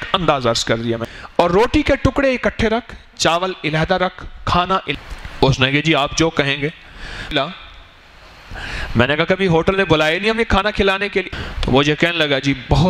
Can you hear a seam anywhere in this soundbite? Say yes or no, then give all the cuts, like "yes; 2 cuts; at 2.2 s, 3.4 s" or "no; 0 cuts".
yes; 4 cuts; at 1.1 s, 4.9 s, 7.3 s, 11.3 s